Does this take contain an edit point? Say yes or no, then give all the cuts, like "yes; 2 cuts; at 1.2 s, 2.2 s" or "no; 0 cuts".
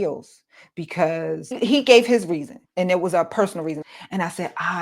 yes; 3 cuts; at 1.5 s, 2.6 s, 3.8 s